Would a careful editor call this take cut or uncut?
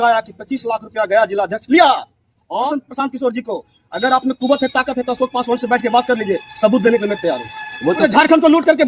cut